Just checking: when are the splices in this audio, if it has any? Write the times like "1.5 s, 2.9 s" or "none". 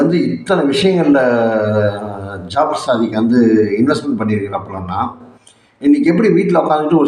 none

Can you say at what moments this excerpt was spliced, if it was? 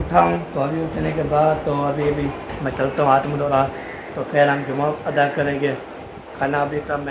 3.5 s

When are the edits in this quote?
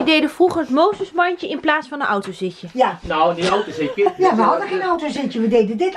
none

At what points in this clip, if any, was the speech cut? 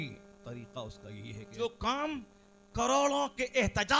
1.5 s

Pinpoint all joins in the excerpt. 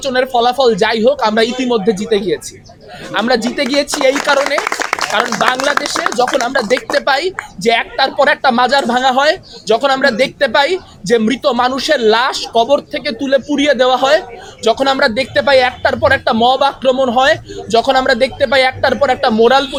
none

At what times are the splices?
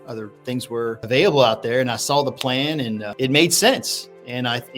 1.0 s, 3.1 s

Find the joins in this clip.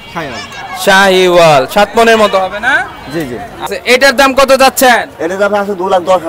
3.7 s

